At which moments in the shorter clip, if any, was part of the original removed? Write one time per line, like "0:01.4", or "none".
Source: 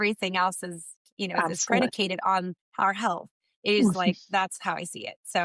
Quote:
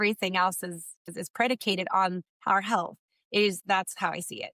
0:01.2
0:03.5